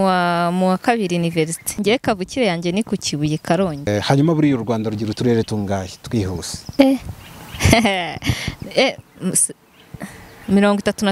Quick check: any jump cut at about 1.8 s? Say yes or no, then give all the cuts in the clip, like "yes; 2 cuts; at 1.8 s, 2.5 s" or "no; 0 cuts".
yes; 3 cuts; at 1.8 s, 3.9 s, 6.6 s